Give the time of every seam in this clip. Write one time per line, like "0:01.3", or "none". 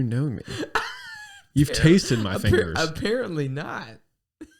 none